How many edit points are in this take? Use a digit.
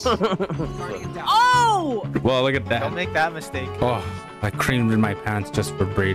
2